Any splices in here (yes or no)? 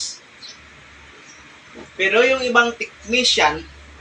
no